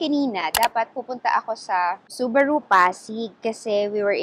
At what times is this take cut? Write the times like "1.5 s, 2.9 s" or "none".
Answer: 2.1 s